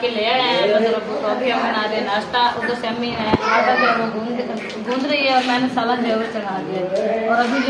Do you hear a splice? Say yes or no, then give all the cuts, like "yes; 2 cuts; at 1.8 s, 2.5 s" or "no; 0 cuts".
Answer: no; 0 cuts